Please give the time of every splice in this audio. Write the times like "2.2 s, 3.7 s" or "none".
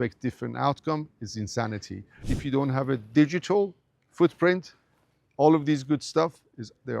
2.2 s